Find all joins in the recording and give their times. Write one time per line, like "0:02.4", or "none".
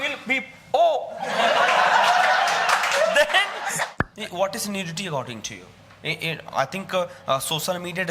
0:03.9